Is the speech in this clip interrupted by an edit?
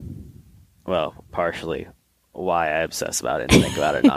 no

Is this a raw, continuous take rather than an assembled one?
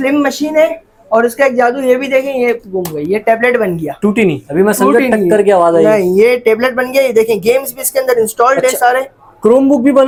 yes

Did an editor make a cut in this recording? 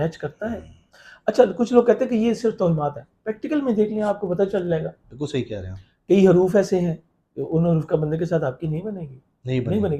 no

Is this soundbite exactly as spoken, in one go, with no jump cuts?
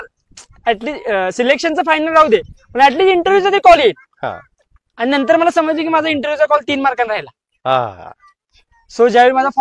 yes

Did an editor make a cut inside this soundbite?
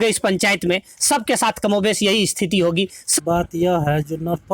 yes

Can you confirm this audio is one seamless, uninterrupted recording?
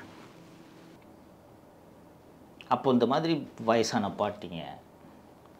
no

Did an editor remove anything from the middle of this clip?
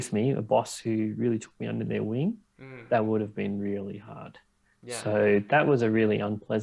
no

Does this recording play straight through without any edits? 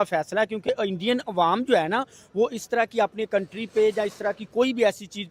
yes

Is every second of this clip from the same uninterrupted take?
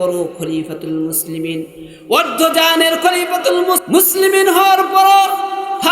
no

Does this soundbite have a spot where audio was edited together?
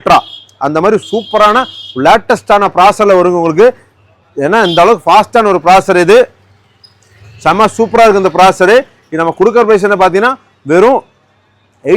no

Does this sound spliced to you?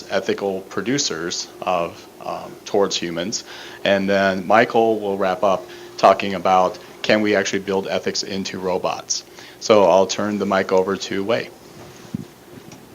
yes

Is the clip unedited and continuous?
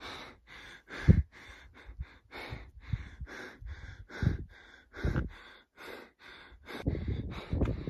no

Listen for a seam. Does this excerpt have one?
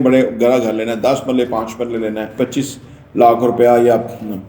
yes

